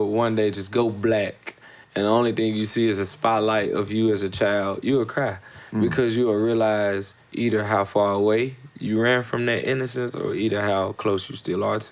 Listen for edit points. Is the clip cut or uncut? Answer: uncut